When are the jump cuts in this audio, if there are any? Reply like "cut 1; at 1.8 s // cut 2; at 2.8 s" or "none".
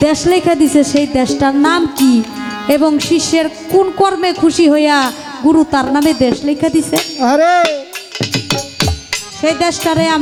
none